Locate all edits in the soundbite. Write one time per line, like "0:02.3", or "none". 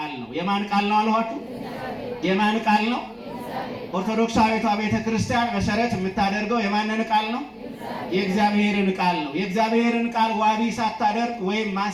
none